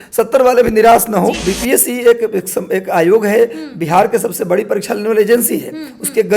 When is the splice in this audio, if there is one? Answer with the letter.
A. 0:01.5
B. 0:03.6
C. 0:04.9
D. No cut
A